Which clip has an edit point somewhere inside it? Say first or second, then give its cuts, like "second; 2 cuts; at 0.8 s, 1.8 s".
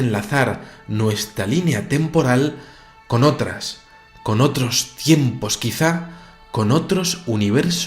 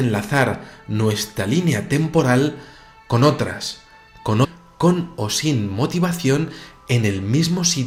first; 1 cut; at 4.4 s